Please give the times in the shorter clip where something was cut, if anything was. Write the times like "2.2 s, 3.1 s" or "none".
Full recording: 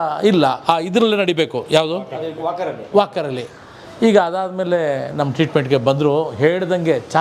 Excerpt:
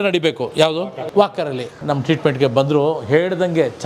1.0 s, 1.8 s

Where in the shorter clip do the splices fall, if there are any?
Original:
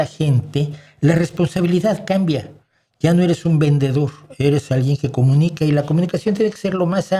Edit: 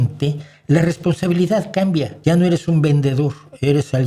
2.1 s

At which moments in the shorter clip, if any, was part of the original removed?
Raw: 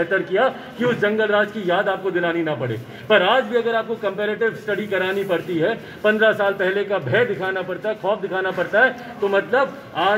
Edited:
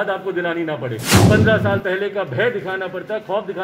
1.1 s

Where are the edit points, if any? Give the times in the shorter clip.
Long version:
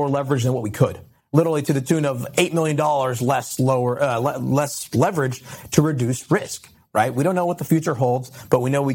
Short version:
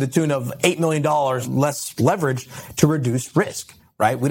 1.4 s

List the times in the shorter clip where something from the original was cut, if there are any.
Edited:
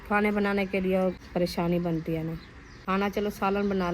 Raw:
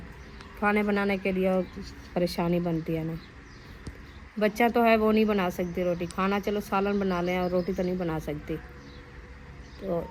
1.2 s, 2.8 s

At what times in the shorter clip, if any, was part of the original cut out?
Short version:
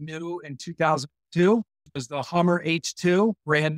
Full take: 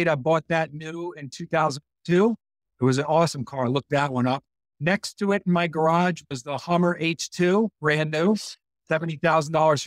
1.9 s

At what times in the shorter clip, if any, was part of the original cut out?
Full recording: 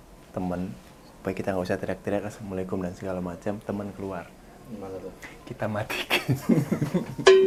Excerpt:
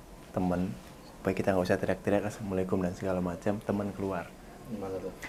none

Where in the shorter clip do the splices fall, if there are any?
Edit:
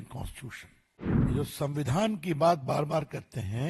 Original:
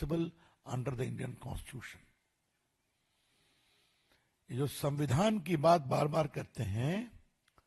1.3 s

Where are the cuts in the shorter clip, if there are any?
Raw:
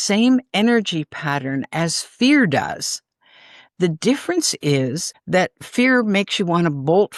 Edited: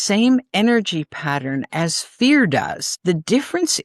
2.8 s

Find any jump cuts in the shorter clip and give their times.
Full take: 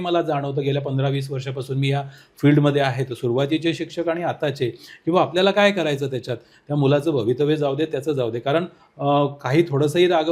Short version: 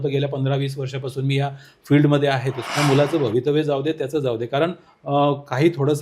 2.6 s

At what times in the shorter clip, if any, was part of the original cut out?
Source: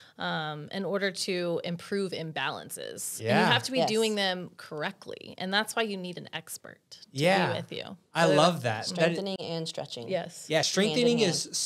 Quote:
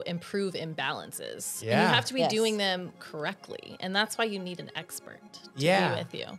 none

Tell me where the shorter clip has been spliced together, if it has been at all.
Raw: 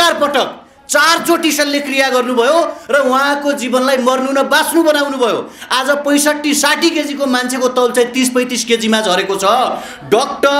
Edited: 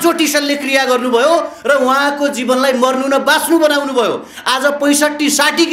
none

